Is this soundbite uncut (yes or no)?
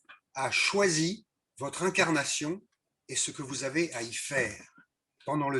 yes